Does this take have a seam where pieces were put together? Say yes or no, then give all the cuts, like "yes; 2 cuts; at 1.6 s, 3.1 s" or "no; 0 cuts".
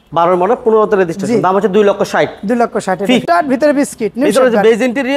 yes; 1 cut; at 3.2 s